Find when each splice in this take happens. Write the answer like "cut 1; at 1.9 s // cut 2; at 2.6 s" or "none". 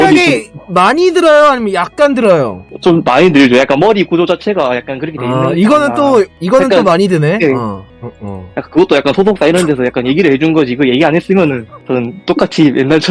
cut 1; at 7.9 s